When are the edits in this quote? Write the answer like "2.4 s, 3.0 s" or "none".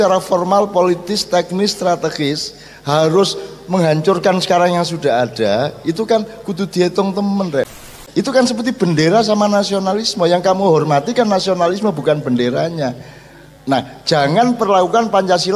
7.7 s